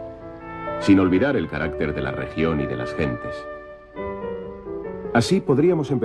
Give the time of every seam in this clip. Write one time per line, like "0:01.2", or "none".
0:01.4